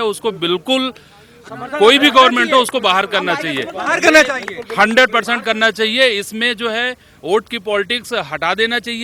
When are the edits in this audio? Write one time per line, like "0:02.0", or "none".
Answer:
none